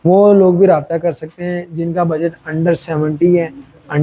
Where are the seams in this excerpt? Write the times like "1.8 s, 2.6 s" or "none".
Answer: none